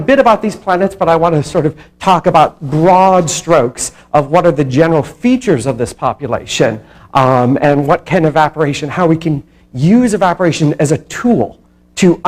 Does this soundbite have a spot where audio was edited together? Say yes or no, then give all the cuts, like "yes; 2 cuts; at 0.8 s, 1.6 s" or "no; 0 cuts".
yes; 1 cut; at 4.9 s